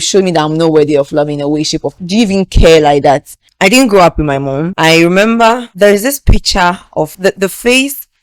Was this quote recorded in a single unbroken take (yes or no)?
no